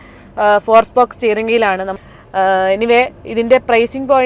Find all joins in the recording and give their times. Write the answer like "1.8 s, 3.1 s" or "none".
1.9 s

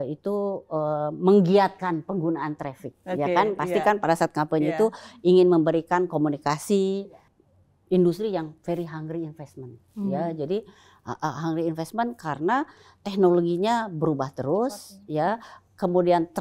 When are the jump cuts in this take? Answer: 7.1 s

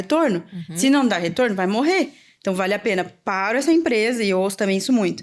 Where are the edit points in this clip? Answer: none

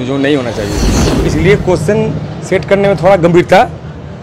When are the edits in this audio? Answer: 1.0 s

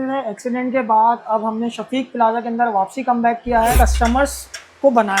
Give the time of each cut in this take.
1.2 s, 3.7 s

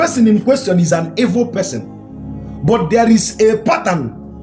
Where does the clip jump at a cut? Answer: none

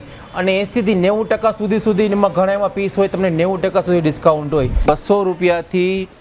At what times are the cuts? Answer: 4.8 s

